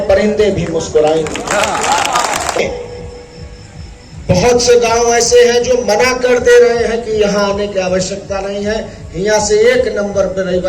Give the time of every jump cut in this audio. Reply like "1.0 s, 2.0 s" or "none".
2.6 s